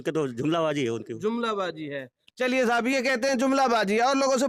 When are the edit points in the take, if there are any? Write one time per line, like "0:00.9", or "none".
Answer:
none